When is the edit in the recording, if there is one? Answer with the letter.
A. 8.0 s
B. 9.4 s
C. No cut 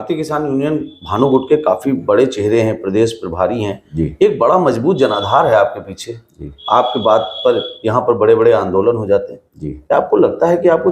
C